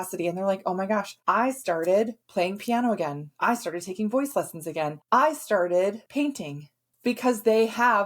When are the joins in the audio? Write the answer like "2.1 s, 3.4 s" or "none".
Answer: 1.1 s, 2.2 s, 3.2 s, 5.0 s, 6.5 s